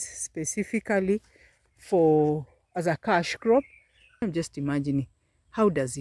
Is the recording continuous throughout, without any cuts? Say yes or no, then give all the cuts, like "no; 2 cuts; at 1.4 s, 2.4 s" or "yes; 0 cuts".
no; 1 cut; at 4.2 s